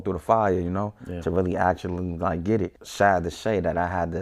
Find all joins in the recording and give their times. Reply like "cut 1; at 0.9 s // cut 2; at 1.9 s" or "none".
cut 1; at 2.8 s